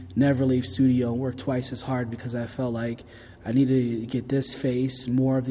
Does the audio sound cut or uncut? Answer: uncut